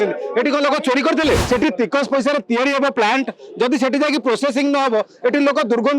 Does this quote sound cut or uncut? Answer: cut